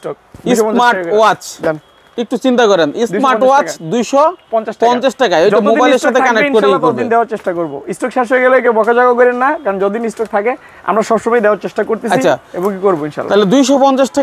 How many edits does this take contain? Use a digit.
0